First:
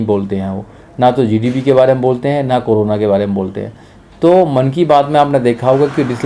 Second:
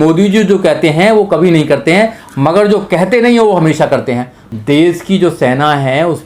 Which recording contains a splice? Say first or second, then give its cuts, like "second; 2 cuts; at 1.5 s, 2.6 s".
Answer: second; 1 cut; at 4.4 s